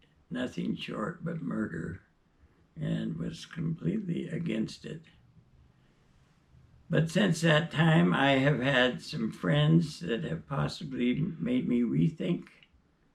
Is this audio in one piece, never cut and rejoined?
yes; 0 cuts

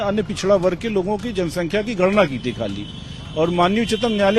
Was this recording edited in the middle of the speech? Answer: no; 0 cuts

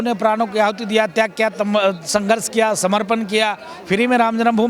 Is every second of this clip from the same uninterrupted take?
yes; 0 cuts

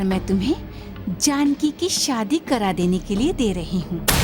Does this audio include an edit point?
no; 0 cuts

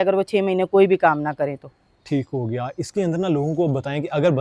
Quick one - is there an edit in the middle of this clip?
no; 0 cuts

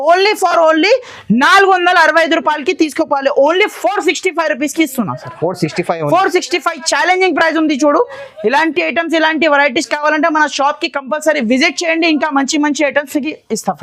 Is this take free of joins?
yes; 0 cuts

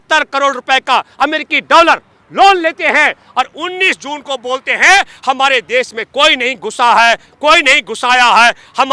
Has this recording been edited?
no; 0 cuts

